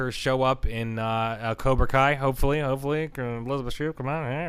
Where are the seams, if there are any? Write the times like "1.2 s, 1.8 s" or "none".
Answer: none